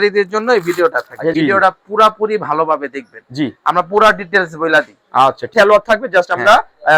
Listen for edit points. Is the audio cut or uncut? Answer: cut